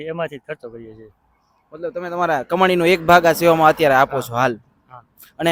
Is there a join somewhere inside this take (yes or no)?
no